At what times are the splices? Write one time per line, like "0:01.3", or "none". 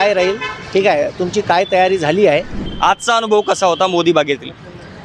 0:02.6